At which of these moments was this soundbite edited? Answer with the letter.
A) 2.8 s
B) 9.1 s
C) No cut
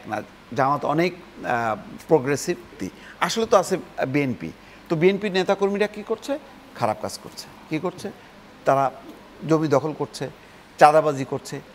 A